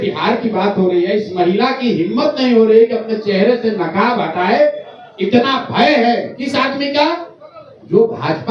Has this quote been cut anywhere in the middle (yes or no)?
no